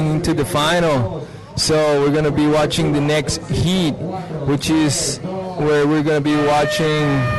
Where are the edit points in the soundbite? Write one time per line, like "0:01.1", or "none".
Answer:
none